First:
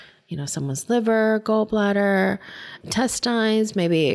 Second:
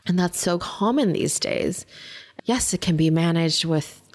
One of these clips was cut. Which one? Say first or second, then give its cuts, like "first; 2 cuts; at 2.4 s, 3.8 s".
first; 1 cut; at 2.7 s